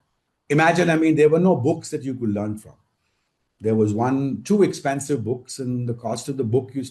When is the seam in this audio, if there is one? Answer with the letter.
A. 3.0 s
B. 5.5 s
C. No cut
C